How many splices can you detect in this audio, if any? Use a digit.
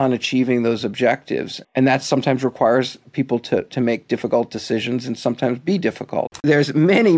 2